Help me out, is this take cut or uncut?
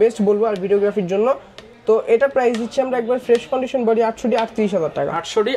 uncut